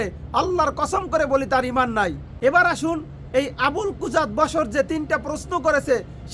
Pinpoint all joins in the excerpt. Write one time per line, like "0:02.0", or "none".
0:02.2